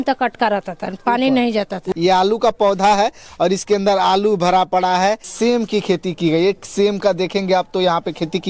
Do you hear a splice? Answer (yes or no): yes